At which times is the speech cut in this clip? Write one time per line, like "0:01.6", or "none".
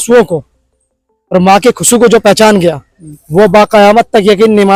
none